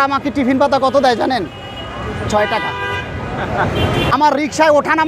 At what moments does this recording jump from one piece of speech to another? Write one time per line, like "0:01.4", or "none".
0:04.1